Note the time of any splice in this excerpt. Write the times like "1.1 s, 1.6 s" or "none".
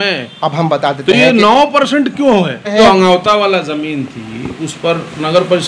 2.8 s